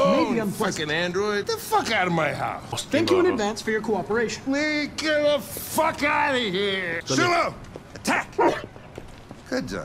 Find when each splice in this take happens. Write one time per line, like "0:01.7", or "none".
0:01.4
0:02.8
0:07.0

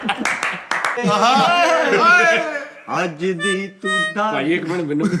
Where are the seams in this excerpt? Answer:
0:01.0

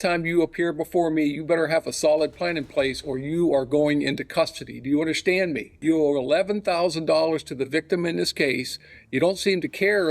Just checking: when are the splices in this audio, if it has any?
0:05.7

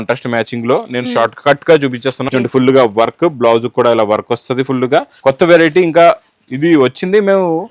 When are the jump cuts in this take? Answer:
0:02.2
0:05.1

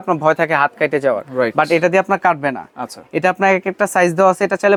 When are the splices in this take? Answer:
none

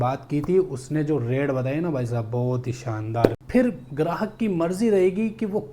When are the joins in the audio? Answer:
0:03.4

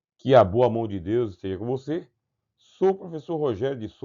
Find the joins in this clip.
0:00.9

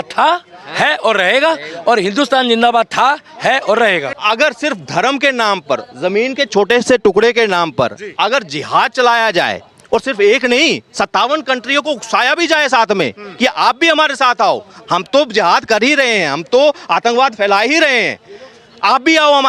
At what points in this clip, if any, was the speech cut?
0:04.1

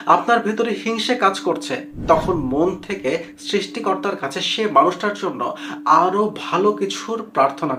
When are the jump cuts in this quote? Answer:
none

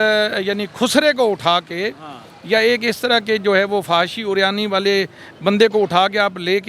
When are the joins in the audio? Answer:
none

